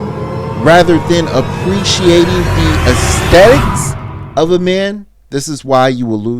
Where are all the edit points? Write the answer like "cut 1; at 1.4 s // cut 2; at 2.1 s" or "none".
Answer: cut 1; at 5.1 s